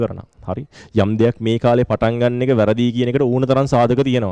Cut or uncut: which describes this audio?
uncut